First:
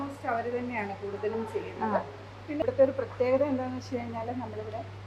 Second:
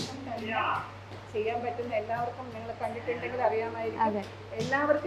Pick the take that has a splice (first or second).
first